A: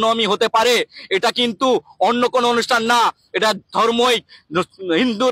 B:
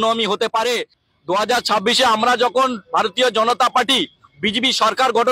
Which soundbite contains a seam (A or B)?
B